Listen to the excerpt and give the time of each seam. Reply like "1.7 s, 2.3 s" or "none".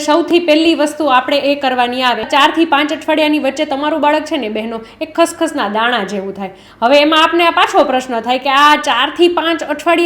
2.3 s